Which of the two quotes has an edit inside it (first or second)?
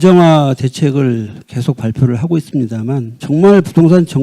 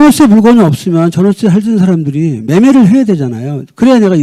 first